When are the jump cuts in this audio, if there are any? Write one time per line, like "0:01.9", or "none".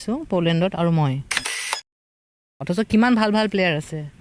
0:01.9